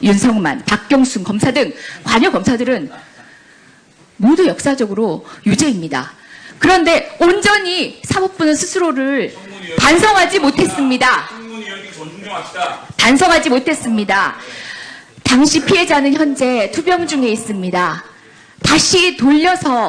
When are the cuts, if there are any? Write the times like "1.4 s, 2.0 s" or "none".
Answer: none